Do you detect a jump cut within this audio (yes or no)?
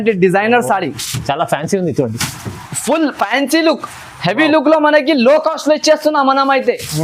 no